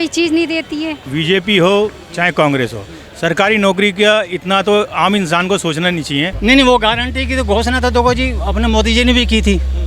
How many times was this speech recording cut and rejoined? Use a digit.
2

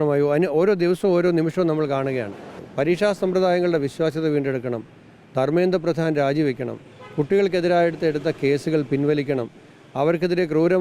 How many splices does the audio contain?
1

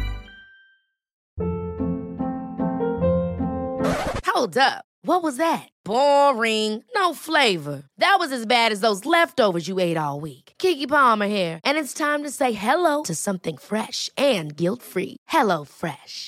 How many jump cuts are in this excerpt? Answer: 1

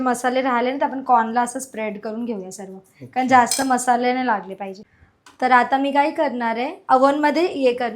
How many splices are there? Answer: 1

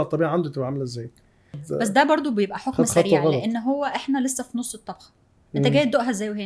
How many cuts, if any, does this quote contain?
1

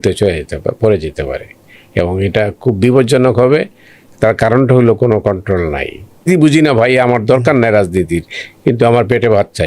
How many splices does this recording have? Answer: 1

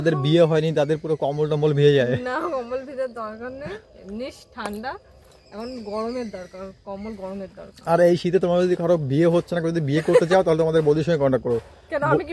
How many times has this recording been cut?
0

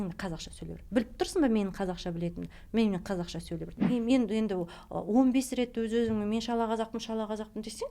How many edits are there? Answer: 1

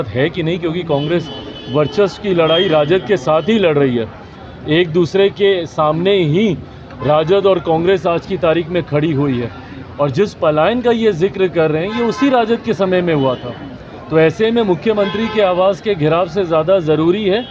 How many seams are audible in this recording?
0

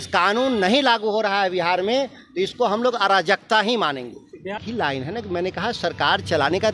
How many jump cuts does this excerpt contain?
1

